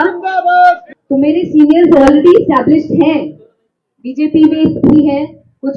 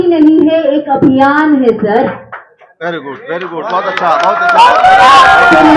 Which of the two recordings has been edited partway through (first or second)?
first